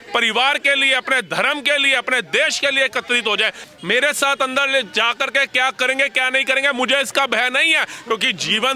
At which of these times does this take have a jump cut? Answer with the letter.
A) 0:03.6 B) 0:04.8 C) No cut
A